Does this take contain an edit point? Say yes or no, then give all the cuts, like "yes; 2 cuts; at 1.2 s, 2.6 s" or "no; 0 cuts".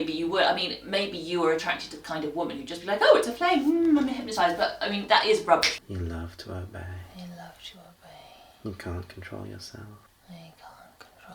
yes; 3 cuts; at 5.7 s, 7.1 s, 10.1 s